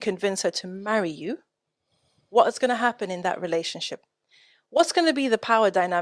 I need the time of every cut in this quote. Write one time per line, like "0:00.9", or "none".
none